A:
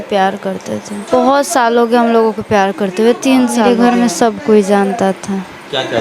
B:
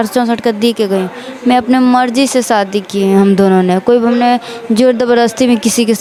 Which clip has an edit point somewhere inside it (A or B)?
A